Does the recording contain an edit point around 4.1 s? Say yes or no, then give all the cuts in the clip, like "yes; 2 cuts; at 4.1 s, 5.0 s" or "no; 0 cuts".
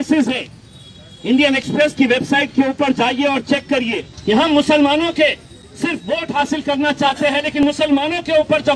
yes; 1 cut; at 4.1 s